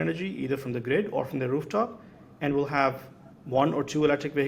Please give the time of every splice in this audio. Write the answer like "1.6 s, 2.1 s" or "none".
none